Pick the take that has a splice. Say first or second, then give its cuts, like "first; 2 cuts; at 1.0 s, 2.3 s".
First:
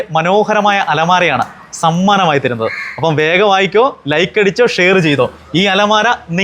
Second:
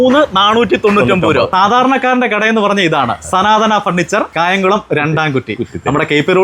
second; 1 cut; at 1.5 s